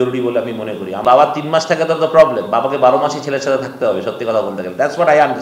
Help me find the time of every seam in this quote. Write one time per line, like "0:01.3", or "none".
0:01.0